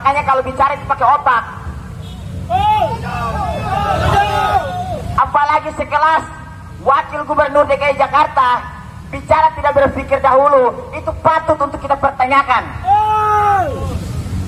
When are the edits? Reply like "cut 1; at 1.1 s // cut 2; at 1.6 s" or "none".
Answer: none